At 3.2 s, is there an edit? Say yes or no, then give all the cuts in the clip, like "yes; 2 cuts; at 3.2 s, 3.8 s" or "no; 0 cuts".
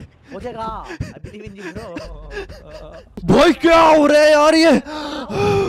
yes; 1 cut; at 3.2 s